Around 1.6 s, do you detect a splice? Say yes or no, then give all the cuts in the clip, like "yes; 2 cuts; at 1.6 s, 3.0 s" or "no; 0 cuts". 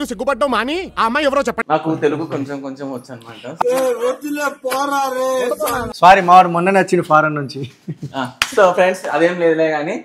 yes; 2 cuts; at 1.6 s, 5.7 s